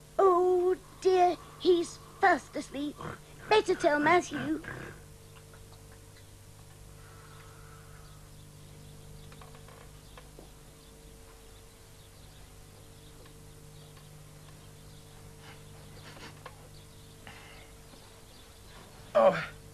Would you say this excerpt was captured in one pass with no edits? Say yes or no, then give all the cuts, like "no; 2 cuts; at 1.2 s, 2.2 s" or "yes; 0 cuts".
no; 1 cut; at 18.0 s